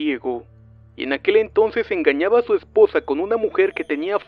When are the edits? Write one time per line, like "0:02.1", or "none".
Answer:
0:01.4